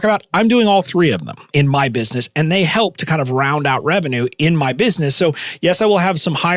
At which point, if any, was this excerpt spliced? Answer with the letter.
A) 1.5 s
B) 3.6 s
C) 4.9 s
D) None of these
A